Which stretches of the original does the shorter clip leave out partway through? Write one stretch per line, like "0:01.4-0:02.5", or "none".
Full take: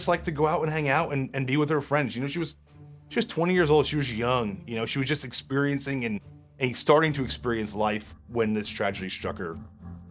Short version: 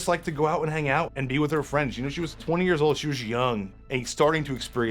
0:01.1-0:01.3
0:02.6-0:03.3
0:04.6-0:06.4